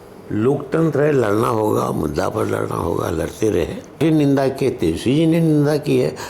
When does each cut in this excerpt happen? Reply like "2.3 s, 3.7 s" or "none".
4.0 s